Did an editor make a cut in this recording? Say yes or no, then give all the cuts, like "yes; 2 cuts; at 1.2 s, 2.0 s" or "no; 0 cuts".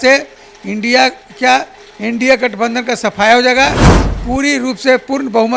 no; 0 cuts